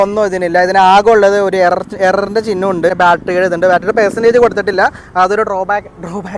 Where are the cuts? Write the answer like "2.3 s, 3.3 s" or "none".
2.9 s